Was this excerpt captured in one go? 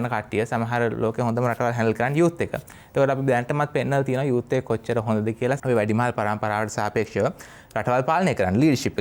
yes; 0 cuts

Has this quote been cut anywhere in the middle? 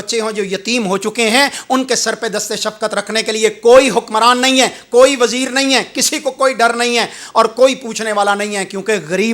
no; 0 cuts

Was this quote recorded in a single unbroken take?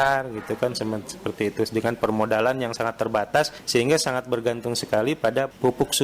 yes; 0 cuts

